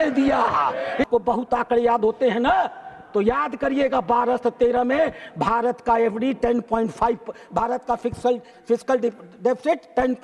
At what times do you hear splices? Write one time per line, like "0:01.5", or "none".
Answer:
0:01.1